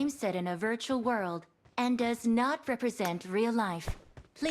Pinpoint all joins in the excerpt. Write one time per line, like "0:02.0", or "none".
0:01.8